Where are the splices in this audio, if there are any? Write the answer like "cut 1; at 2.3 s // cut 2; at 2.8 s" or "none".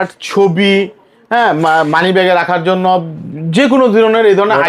none